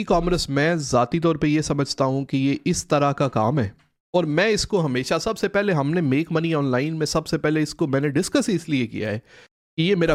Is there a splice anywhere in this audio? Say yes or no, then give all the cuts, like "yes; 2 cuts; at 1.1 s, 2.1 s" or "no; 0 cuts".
no; 0 cuts